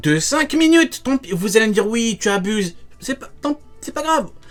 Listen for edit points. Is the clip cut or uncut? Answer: uncut